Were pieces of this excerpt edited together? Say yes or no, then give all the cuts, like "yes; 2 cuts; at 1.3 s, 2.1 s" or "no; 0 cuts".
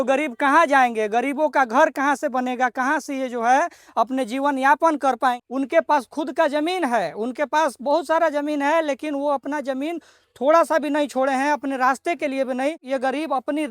yes; 2 cuts; at 5.4 s, 12.8 s